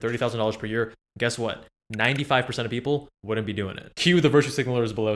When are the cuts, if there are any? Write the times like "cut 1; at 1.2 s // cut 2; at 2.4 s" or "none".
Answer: cut 1; at 3.8 s